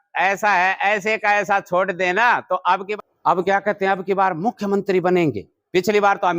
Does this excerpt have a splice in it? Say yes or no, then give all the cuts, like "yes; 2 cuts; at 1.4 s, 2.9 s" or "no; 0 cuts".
yes; 1 cut; at 2.9 s